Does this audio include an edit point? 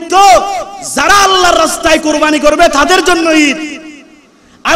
no; 0 cuts

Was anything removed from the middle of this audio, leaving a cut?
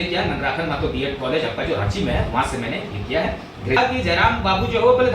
yes; 1 cut; at 3.8 s

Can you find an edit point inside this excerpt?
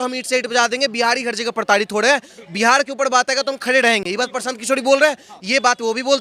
no; 0 cuts

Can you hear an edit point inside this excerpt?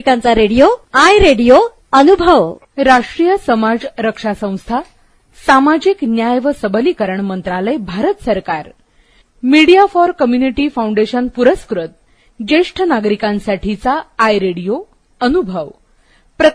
yes; 1 cut; at 2.6 s

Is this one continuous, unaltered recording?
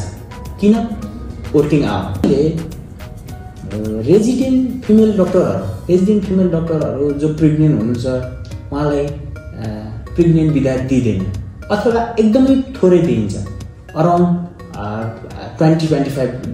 no; 1 cut; at 2.2 s

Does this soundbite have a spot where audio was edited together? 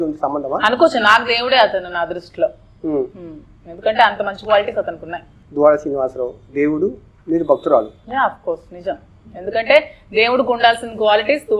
no; 0 cuts

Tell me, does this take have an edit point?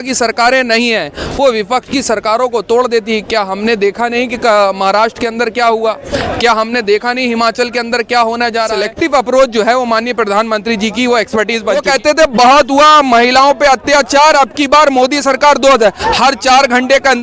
yes; 2 cuts; at 8.8 s, 11.8 s

